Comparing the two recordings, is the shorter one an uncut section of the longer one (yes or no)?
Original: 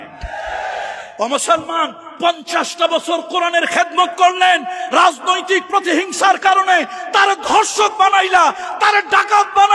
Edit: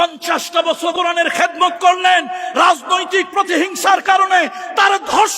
no